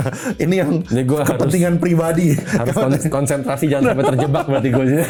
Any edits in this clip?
no; 0 cuts

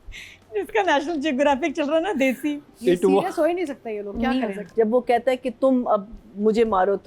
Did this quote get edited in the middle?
yes; 1 cut; at 4.6 s

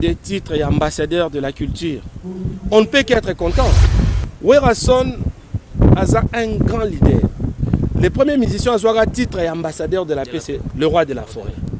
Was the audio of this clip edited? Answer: yes; 1 cut; at 3.9 s

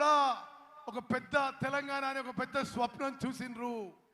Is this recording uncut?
no; 1 cut; at 3.1 s

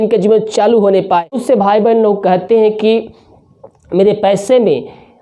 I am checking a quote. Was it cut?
yes; 1 cut; at 1.3 s

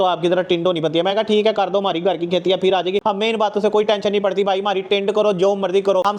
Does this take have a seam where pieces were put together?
no; 0 cuts

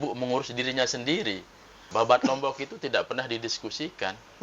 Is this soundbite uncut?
no; 1 cut; at 1.9 s

